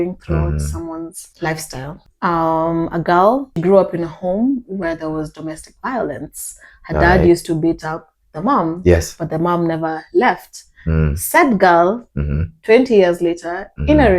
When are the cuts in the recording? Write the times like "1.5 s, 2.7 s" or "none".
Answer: 1.2 s, 2.0 s, 3.6 s